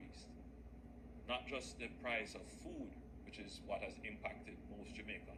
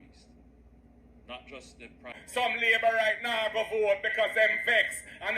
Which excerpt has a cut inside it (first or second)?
second